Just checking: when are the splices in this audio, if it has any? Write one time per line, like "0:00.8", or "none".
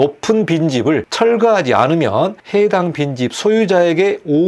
0:01.1
0:02.4